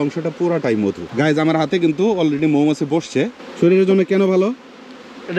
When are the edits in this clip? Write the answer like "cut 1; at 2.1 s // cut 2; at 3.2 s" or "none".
cut 1; at 1.0 s // cut 2; at 3.4 s